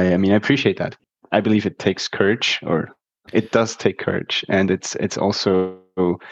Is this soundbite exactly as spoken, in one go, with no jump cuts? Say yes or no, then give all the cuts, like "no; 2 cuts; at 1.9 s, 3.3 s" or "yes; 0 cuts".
no; 1 cut; at 1.1 s